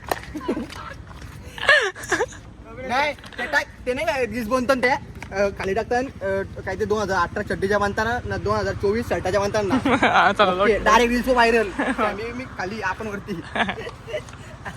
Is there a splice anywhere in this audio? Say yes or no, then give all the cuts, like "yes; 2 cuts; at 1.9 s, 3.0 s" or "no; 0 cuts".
no; 0 cuts